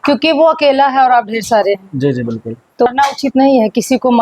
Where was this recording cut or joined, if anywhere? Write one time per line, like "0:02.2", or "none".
0:02.9

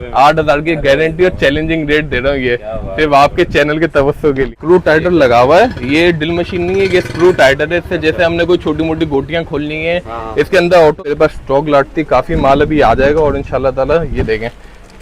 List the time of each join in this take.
0:04.6
0:11.1

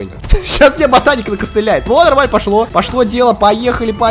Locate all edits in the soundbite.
0:02.7

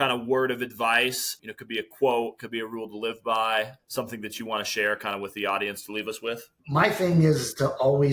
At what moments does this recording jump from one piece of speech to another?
0:01.3
0:03.8
0:06.5

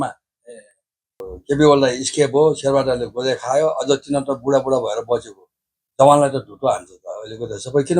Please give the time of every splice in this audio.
0:01.3

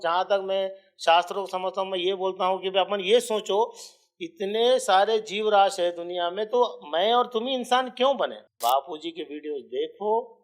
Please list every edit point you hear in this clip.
0:08.4

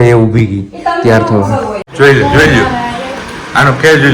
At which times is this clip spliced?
0:01.9

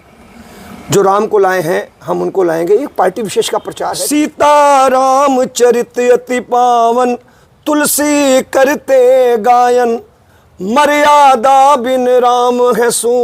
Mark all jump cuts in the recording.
0:03.8

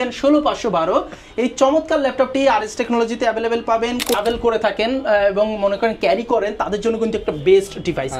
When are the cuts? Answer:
0:04.2

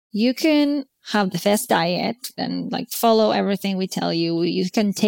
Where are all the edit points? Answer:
0:00.9
0:02.4

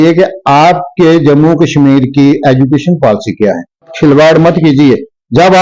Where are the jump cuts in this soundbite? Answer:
0:03.9

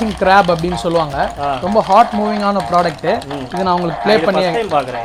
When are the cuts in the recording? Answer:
none

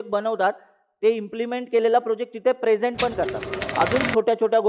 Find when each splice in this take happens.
0:03.6

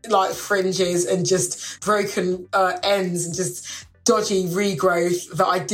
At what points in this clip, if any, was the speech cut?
0:01.7

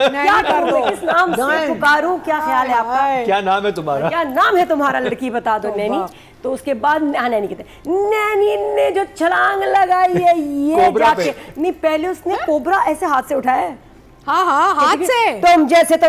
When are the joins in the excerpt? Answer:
none

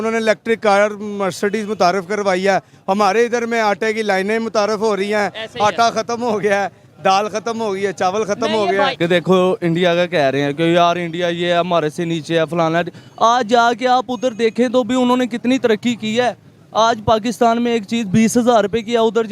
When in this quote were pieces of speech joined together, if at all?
0:08.9

